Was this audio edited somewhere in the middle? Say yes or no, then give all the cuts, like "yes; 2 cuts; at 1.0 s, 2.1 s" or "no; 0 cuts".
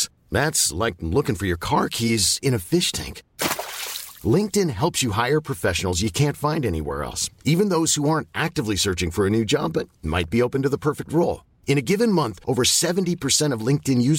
no; 0 cuts